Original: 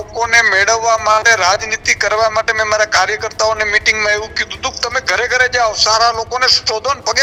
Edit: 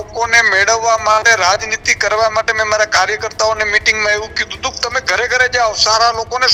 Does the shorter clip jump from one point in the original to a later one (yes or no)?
no